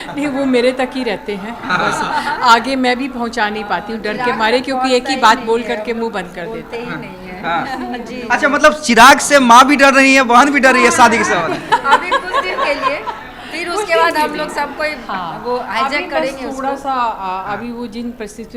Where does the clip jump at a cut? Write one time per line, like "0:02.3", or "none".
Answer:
none